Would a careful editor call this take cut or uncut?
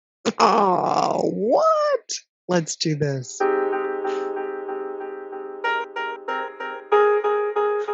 cut